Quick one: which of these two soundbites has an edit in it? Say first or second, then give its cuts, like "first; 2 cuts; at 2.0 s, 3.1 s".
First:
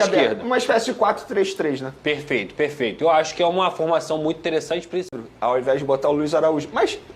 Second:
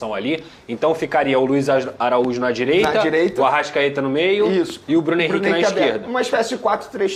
first; 1 cut; at 5.1 s